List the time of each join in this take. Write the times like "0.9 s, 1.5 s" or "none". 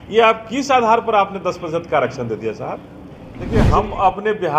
3.5 s